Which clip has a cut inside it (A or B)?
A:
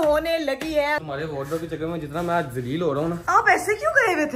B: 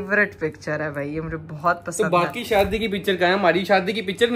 A